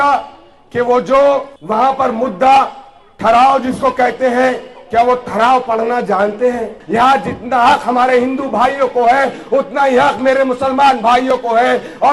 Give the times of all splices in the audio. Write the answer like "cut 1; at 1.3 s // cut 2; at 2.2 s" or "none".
cut 1; at 1.6 s // cut 2; at 6.8 s